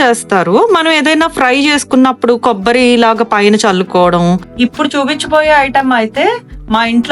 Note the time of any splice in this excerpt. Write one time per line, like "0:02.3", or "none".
0:04.5